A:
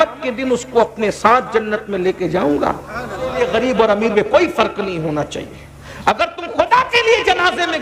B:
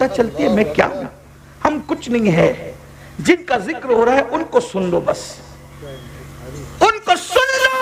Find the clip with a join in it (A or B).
A